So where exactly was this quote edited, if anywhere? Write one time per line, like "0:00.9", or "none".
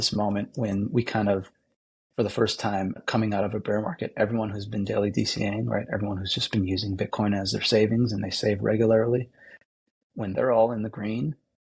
0:03.0